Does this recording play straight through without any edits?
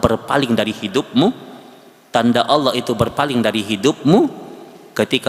yes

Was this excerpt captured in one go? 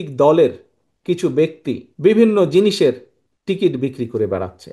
no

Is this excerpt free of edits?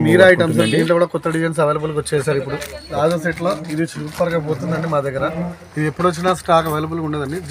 no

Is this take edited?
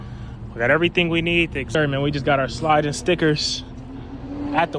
yes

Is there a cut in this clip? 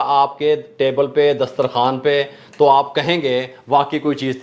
no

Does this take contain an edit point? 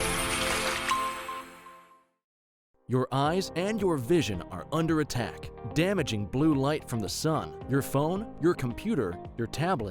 no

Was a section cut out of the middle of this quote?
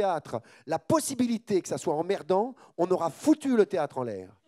no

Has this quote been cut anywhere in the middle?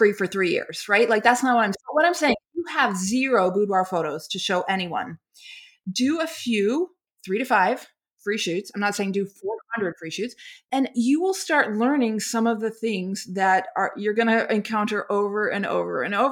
yes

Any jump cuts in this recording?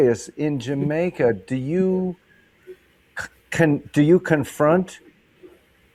no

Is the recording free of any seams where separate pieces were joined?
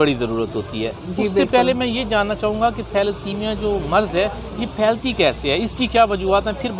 yes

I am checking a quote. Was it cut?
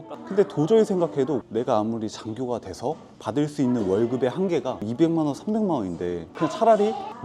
yes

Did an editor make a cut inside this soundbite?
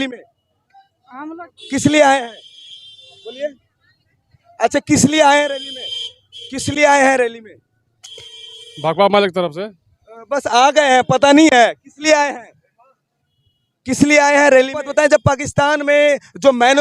yes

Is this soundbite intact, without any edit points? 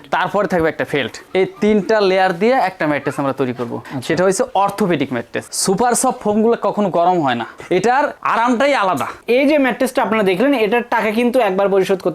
no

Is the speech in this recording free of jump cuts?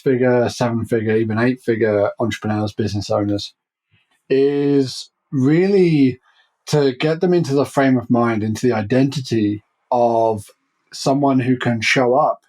yes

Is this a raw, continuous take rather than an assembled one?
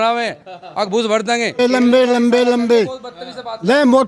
no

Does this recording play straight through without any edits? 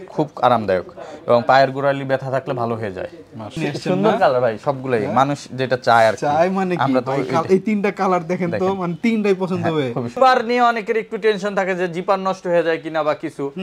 no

